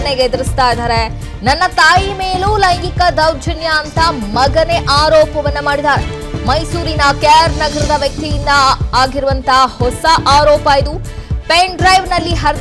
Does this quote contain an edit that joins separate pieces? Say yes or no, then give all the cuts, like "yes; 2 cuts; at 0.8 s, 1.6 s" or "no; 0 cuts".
no; 0 cuts